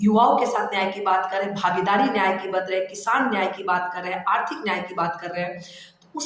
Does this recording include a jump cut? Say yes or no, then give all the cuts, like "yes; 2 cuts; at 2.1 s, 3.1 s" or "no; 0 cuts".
no; 0 cuts